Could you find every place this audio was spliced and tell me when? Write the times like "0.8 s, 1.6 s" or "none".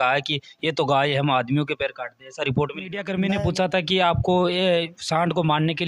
3.1 s